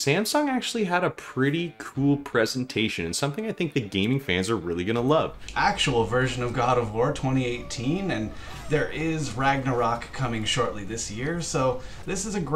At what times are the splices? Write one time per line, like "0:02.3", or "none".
0:05.4